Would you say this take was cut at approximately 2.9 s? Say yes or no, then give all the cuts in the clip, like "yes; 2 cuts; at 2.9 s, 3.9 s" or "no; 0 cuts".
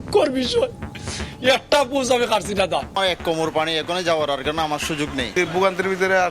yes; 2 cuts; at 2.9 s, 5.3 s